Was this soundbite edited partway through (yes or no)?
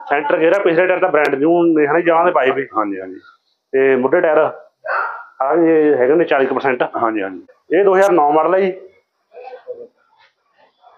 yes